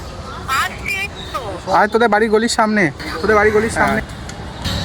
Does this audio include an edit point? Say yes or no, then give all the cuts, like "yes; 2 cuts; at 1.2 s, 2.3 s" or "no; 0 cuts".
yes; 1 cut; at 3.9 s